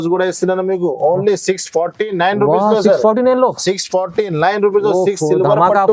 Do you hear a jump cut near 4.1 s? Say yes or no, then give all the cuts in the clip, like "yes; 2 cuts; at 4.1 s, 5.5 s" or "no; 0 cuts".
no; 0 cuts